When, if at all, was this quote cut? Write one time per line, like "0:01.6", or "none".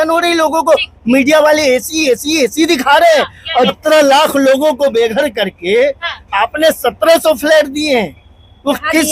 0:03.7